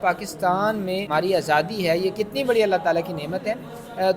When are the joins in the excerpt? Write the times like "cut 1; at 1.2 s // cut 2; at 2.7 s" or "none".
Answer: cut 1; at 1.1 s